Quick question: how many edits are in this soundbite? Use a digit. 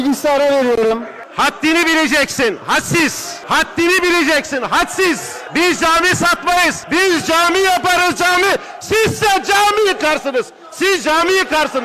4